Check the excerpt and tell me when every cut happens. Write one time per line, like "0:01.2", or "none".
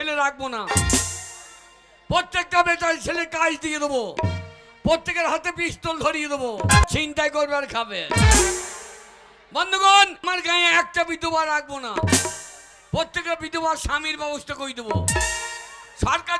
0:06.8
0:10.2